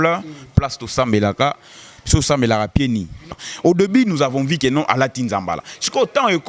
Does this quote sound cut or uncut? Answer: cut